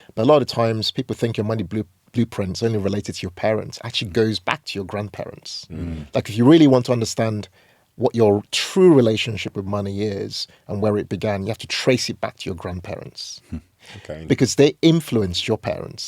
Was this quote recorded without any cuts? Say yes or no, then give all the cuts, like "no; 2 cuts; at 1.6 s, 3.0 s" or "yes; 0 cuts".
yes; 0 cuts